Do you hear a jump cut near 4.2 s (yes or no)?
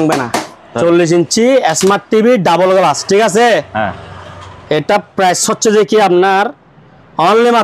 no